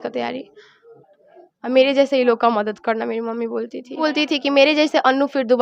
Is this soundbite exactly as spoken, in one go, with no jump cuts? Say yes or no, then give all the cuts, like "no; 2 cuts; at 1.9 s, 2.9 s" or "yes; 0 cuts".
no; 1 cut; at 3.9 s